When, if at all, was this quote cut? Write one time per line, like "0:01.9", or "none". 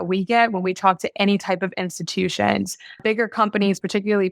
0:03.0